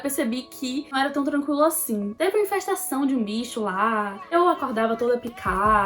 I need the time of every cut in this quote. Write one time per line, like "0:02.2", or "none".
0:02.1